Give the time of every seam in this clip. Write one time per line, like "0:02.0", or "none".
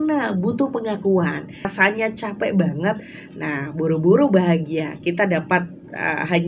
0:01.7